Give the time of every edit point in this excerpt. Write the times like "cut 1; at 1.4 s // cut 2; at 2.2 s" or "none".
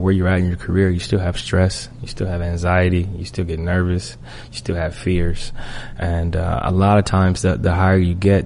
none